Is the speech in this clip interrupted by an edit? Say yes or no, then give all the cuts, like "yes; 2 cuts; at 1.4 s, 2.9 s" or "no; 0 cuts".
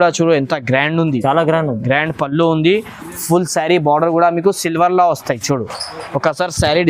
no; 0 cuts